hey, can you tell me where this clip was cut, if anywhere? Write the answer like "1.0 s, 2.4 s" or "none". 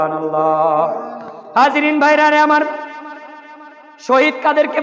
none